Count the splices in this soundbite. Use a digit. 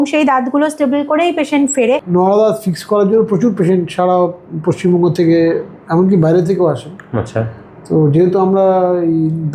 1